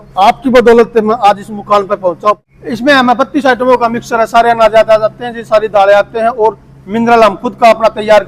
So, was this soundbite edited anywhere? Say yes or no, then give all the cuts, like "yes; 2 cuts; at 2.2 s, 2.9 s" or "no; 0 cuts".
yes; 1 cut; at 2.4 s